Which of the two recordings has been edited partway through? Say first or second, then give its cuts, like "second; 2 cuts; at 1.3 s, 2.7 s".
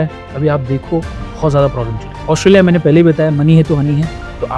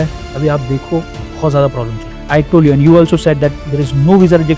second; 1 cut; at 2.1 s